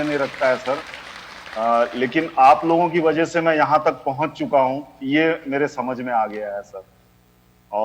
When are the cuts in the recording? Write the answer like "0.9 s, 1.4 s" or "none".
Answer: none